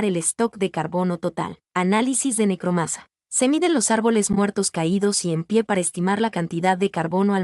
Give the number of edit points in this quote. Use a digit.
1